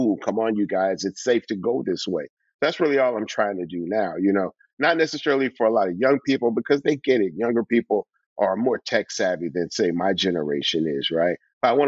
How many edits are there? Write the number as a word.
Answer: zero